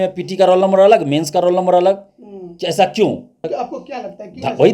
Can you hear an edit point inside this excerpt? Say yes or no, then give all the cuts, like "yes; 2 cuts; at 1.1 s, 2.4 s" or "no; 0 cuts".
yes; 1 cut; at 3.5 s